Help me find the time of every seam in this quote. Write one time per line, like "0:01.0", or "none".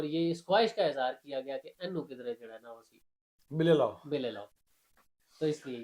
none